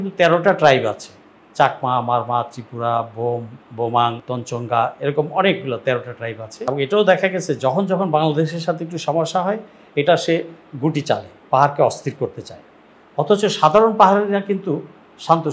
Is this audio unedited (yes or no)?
no